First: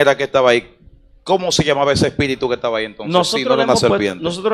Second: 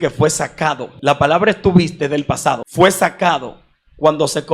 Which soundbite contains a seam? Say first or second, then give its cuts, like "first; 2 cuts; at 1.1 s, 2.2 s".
second; 2 cuts; at 0.9 s, 2.7 s